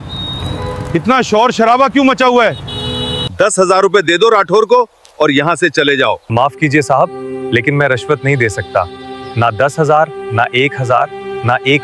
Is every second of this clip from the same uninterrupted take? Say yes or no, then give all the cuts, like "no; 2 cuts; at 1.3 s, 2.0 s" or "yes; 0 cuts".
no; 2 cuts; at 3.2 s, 6.2 s